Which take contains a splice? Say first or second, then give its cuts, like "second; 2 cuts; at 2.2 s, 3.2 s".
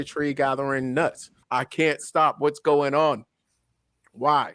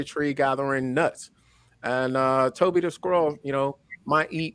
first; 1 cut; at 1.4 s